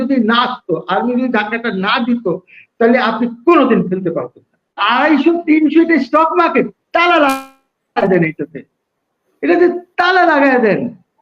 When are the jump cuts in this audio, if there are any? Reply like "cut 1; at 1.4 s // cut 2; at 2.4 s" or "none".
cut 1; at 4.7 s

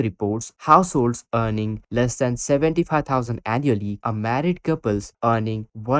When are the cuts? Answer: cut 1; at 4.0 s

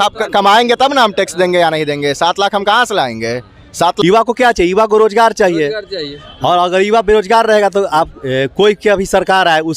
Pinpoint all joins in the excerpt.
cut 1; at 0.9 s // cut 2; at 4.0 s

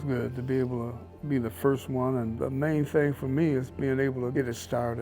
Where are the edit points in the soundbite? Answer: cut 1; at 2.3 s // cut 2; at 4.3 s

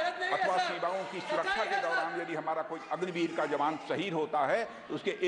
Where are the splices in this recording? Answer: none

